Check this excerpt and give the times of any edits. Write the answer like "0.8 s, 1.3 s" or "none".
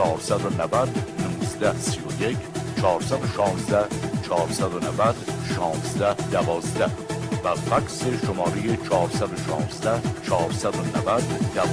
8.2 s